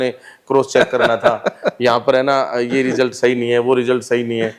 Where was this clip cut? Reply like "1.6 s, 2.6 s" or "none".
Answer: none